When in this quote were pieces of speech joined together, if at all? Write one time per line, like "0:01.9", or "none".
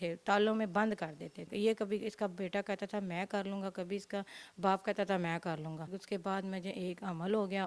0:01.4
0:05.9